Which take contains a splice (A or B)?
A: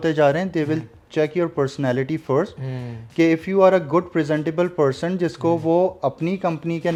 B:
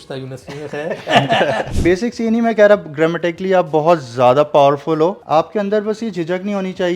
B